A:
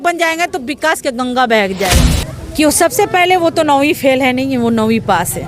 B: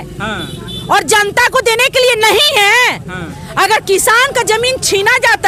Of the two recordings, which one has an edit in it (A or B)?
A